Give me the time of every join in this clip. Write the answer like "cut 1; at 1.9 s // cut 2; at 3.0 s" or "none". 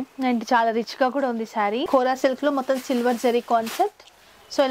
cut 1; at 1.9 s